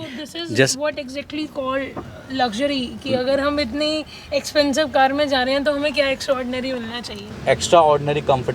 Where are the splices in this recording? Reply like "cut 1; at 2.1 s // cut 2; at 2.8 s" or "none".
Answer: cut 1; at 7.2 s